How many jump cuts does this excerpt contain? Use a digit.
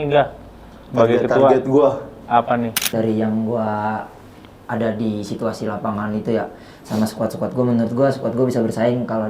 1